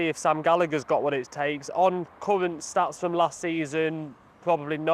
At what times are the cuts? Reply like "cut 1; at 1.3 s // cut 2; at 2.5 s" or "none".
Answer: none